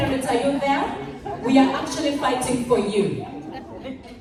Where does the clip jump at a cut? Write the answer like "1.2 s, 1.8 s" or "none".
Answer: none